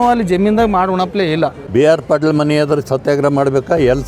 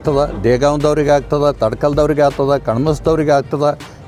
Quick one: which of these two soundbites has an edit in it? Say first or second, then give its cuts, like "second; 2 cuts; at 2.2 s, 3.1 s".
first; 1 cut; at 1.6 s